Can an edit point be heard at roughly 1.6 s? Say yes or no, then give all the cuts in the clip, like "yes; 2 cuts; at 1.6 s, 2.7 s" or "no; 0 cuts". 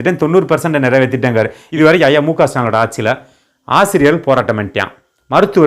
yes; 1 cut; at 1.6 s